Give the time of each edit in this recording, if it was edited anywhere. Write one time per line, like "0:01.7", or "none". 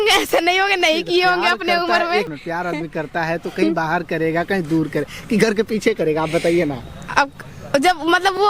none